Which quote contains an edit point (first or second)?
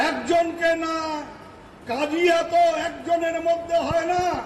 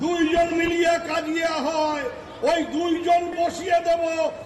second